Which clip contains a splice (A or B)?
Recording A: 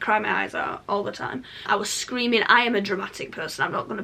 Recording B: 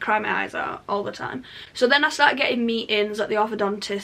A